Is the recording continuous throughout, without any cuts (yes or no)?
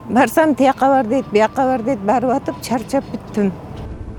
yes